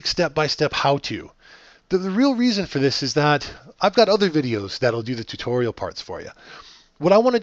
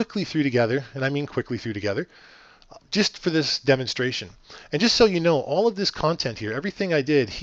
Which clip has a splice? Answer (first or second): second